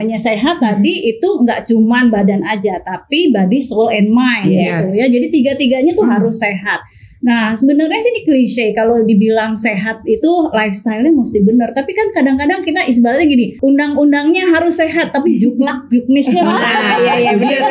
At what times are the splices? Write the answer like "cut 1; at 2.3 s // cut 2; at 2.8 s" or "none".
cut 1; at 13.5 s